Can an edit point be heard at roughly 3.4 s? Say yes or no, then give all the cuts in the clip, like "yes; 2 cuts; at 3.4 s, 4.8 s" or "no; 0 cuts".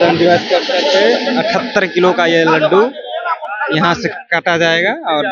no; 0 cuts